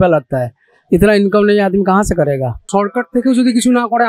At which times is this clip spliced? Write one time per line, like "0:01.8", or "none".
0:02.6